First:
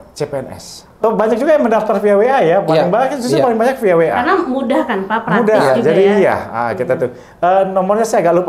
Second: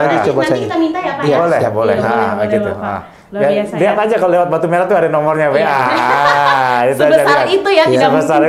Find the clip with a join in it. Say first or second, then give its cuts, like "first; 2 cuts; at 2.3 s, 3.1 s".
first; 1 cut; at 1.0 s